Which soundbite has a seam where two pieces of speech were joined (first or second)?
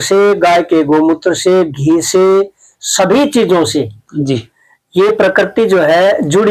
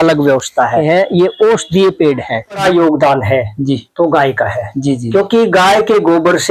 second